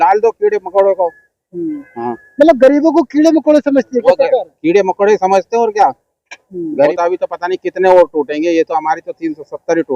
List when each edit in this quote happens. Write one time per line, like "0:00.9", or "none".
0:06.4